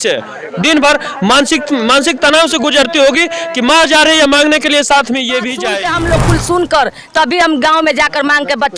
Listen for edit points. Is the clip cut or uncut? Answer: cut